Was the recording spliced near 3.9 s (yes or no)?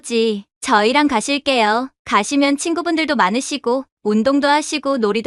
no